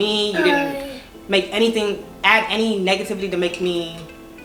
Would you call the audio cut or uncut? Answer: uncut